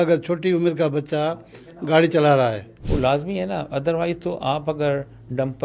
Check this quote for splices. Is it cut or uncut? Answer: cut